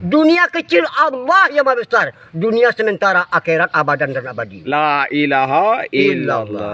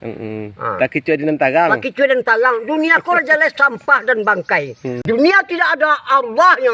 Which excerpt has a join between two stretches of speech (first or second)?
second